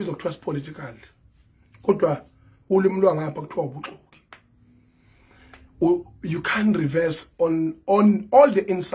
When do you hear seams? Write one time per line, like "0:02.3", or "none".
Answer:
none